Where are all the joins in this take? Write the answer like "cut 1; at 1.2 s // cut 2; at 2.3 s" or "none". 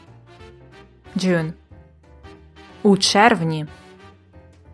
cut 1; at 3.7 s